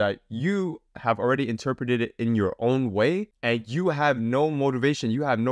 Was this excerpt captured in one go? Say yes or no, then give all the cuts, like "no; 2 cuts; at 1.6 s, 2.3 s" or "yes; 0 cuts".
yes; 0 cuts